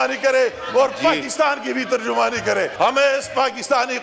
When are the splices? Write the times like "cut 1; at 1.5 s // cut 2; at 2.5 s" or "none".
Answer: cut 1; at 2.7 s